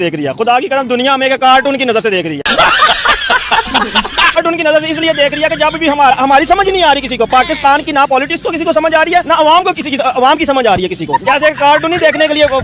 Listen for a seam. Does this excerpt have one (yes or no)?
no